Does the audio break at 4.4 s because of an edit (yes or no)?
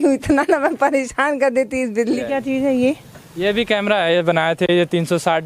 no